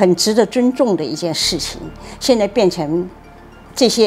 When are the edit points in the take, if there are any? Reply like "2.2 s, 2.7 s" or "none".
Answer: none